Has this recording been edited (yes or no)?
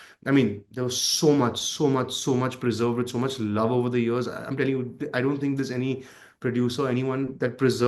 no